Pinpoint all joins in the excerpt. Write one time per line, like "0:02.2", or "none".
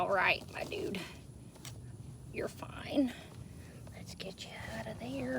none